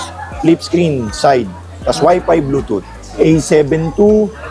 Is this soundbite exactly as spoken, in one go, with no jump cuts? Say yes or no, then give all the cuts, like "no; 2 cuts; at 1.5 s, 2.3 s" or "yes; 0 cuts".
no; 1 cut; at 3.1 s